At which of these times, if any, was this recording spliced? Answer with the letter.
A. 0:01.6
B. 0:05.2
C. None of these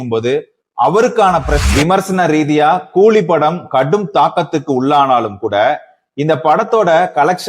A